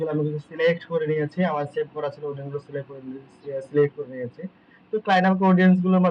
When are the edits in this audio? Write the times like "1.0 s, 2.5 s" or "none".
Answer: none